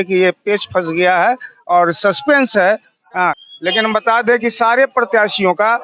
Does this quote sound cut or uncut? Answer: cut